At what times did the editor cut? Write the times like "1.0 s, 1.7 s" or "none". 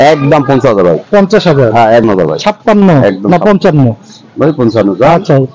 2.0 s